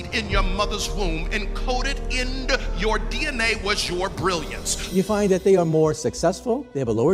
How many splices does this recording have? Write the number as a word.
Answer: one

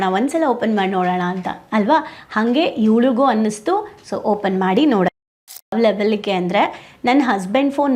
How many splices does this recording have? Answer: one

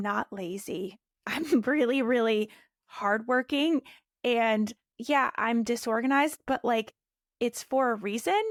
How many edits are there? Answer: zero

